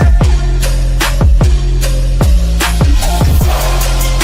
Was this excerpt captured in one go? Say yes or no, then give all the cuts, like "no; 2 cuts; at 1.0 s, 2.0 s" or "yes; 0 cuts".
yes; 0 cuts